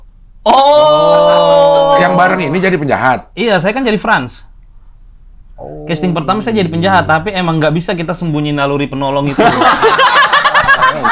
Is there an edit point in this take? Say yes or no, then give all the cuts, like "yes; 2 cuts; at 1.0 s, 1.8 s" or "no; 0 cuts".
no; 0 cuts